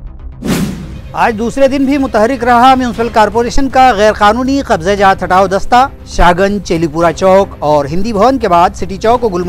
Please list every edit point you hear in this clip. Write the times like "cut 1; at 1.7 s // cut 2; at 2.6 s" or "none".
cut 1; at 0.9 s